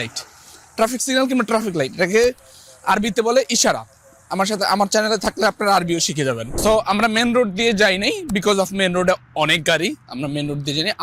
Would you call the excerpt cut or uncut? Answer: cut